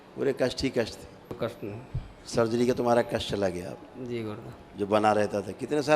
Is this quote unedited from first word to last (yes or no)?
no